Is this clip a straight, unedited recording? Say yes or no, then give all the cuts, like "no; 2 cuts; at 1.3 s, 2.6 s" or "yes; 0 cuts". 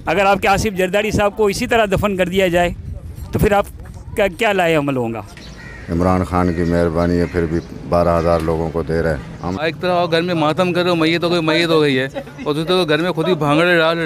no; 2 cuts; at 5.3 s, 9.5 s